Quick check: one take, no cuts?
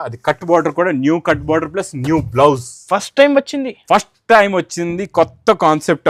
yes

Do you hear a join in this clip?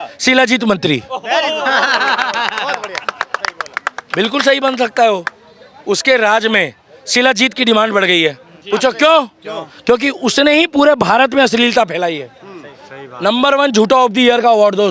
no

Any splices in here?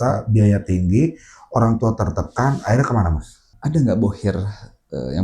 yes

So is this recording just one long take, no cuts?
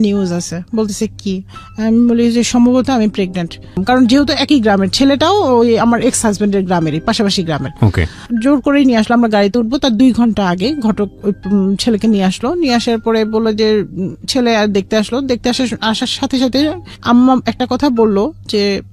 no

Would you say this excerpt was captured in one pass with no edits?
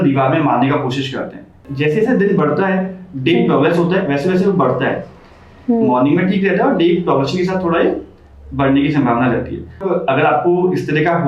no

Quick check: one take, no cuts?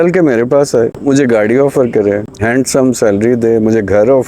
no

